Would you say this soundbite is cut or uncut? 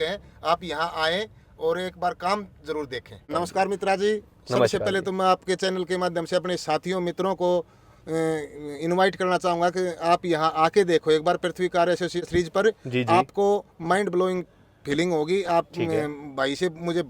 cut